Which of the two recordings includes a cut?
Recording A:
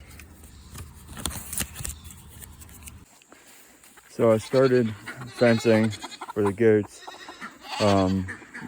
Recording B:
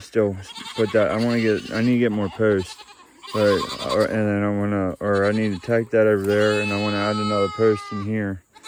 A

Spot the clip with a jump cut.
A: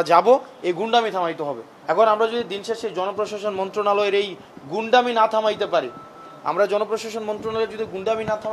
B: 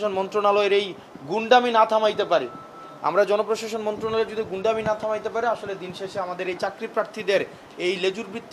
A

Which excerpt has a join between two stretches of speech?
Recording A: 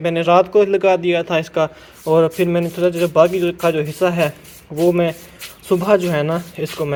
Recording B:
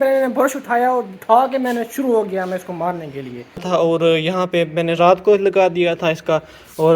B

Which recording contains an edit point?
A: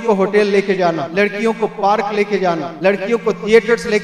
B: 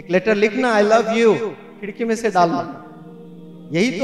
A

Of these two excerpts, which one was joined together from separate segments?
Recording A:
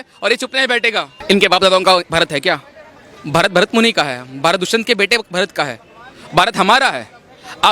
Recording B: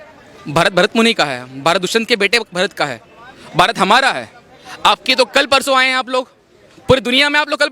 A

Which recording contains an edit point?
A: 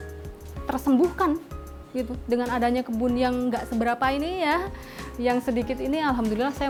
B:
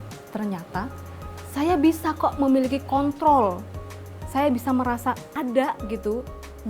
B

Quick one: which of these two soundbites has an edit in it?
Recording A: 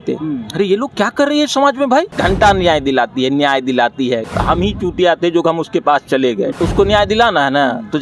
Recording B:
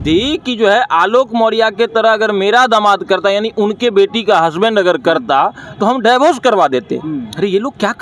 A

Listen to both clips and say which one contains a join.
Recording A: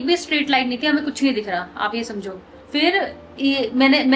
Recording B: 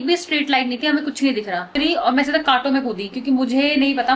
B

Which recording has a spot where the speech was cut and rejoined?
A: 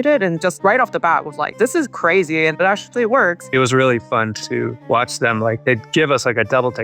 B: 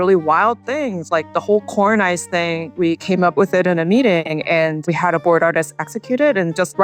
A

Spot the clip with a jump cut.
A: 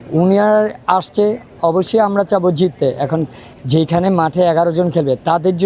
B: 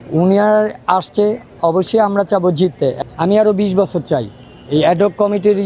B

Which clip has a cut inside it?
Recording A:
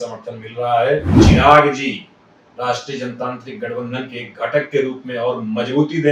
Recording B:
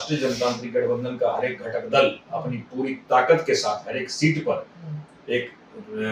A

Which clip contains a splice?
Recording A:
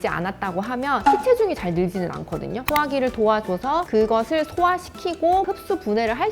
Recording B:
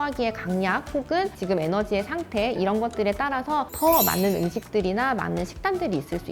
A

